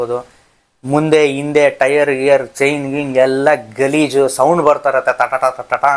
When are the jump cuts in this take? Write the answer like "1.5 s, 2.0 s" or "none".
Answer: none